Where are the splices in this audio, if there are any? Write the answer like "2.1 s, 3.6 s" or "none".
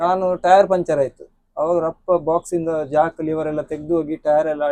none